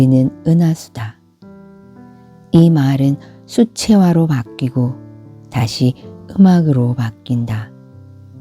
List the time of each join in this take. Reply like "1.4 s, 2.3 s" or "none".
1.2 s, 2.5 s